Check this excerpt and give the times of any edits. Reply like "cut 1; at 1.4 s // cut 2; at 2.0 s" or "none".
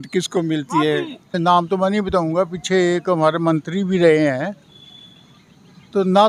cut 1; at 1.4 s